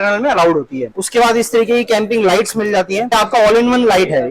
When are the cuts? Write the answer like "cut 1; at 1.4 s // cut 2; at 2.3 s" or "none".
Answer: cut 1; at 0.9 s // cut 2; at 3.1 s